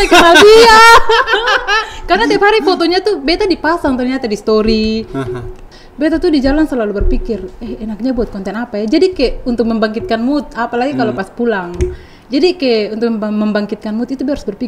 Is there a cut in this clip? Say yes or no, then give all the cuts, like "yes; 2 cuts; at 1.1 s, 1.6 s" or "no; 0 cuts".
yes; 1 cut; at 5.6 s